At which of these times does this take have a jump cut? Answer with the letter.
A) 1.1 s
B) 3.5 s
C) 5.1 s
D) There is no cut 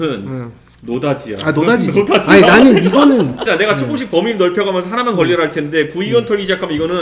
B